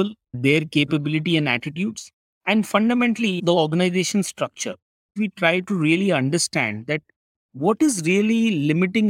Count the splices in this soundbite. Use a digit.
1